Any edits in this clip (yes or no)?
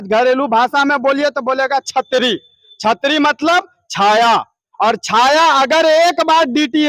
no